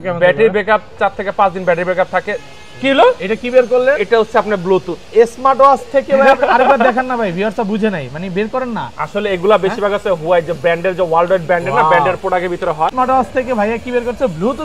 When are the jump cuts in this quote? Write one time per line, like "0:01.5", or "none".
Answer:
0:12.9